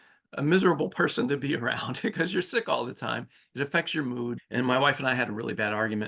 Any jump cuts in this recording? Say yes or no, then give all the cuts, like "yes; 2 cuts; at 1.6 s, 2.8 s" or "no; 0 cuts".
yes; 1 cut; at 4.4 s